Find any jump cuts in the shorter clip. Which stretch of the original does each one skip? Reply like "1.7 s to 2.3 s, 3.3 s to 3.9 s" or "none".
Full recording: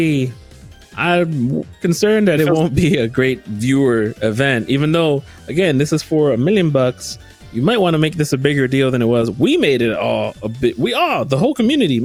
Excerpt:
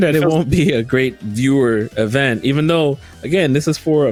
none